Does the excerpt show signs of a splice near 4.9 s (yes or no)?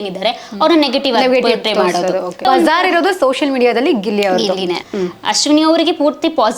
yes